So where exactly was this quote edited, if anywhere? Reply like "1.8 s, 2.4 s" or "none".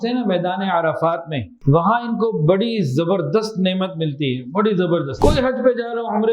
1.5 s, 5.1 s